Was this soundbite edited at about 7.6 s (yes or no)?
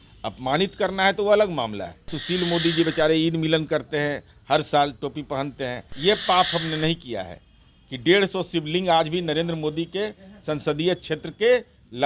no